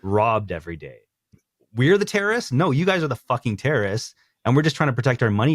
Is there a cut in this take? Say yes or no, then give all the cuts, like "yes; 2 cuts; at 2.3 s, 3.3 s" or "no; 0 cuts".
yes; 1 cut; at 1.3 s